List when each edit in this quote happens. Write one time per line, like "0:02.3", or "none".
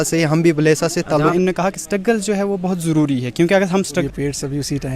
0:01.3
0:03.9